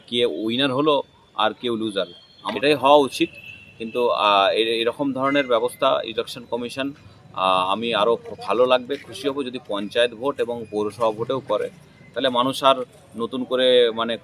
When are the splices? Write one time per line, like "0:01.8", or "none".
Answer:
0:02.5